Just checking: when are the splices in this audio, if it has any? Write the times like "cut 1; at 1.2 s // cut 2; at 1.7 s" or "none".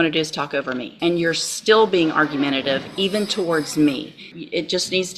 cut 1; at 0.9 s // cut 2; at 4.3 s